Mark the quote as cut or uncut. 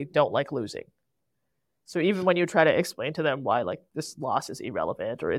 uncut